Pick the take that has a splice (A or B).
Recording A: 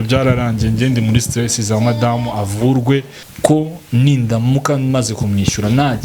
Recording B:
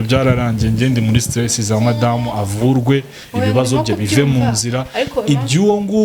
A